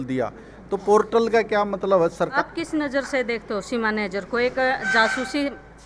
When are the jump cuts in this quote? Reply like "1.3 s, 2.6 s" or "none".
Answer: 2.3 s